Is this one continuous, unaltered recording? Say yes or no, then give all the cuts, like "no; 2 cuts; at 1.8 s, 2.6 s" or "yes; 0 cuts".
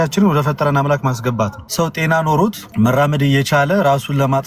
no; 2 cuts; at 1.6 s, 2.6 s